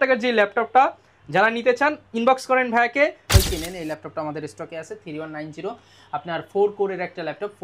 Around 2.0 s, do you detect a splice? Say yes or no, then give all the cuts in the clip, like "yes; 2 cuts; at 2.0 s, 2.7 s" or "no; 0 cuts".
no; 1 cut; at 3.3 s